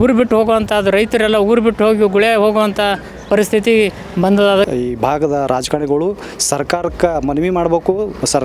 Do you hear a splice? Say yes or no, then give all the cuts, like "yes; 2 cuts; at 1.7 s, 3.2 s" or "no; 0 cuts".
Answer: yes; 1 cut; at 4.7 s